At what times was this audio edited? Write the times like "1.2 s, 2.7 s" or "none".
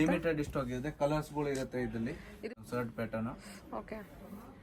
2.5 s